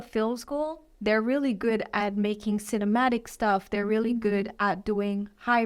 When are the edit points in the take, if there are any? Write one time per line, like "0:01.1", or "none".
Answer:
none